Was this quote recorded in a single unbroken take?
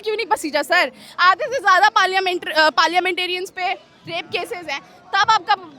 yes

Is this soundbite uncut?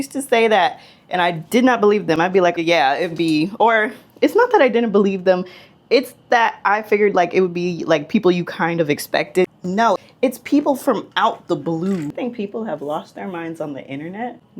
no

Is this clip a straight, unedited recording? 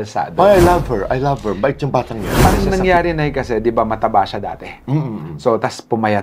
no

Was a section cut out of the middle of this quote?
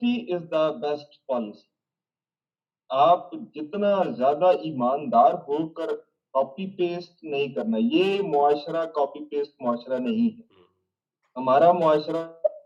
no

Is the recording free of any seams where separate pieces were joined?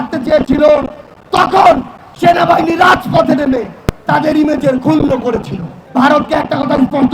no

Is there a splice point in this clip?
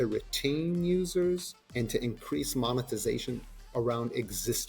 yes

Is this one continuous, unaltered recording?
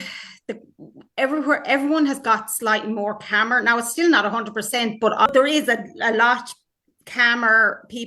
no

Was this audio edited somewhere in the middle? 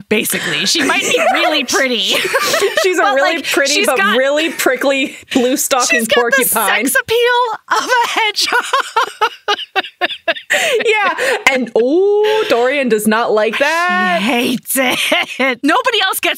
no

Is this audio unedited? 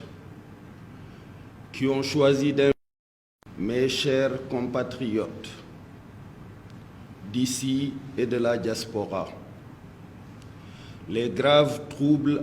no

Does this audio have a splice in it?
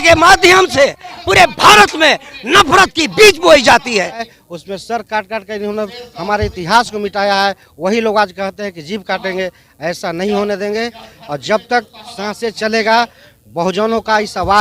yes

